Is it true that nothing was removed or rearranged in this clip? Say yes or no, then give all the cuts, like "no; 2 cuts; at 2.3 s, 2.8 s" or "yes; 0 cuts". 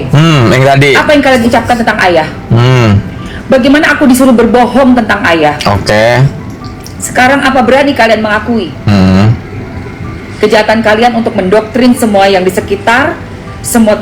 yes; 0 cuts